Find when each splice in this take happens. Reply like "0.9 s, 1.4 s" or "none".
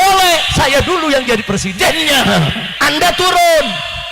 2.7 s